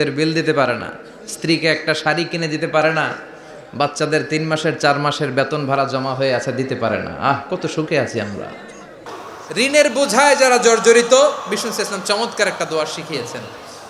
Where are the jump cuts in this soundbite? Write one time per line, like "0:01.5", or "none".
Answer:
0:08.9